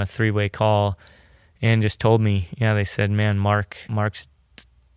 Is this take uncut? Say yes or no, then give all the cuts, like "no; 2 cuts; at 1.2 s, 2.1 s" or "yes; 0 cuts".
no; 1 cut; at 3.8 s